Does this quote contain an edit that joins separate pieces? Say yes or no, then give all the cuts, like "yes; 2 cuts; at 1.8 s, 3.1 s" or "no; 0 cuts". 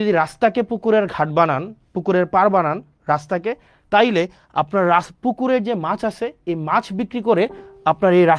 no; 0 cuts